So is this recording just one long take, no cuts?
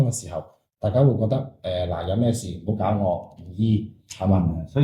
yes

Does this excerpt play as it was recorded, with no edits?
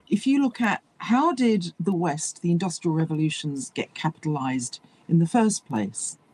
yes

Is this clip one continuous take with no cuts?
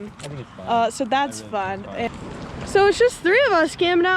yes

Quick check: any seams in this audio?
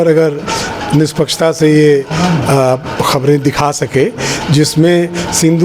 no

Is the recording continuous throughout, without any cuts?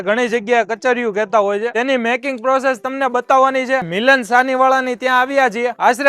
no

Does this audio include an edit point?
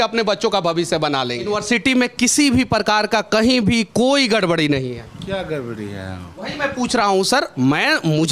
yes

